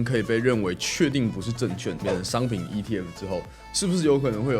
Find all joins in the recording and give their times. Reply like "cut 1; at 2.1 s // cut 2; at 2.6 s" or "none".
cut 1; at 2.0 s